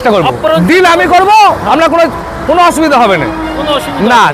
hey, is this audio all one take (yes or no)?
yes